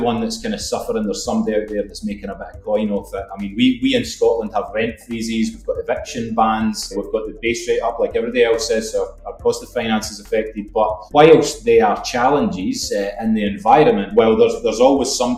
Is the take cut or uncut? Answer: uncut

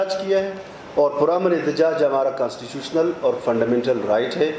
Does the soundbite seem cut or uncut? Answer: uncut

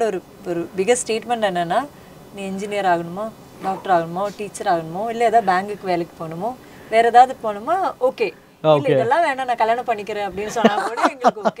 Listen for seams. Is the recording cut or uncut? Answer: uncut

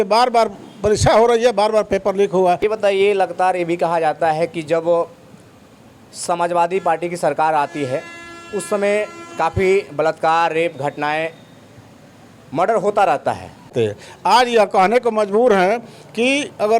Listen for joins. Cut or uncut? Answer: cut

